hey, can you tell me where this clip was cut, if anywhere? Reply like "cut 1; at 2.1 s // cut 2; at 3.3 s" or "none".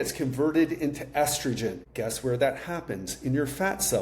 cut 1; at 1.9 s